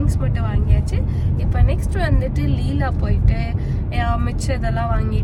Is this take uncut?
yes; 0 cuts

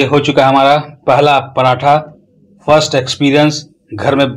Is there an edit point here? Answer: no; 0 cuts

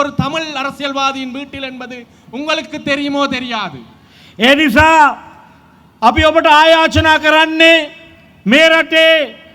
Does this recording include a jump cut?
no; 0 cuts

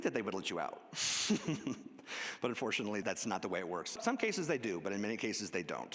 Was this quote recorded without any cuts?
no; 2 cuts; at 3.0 s, 4.0 s

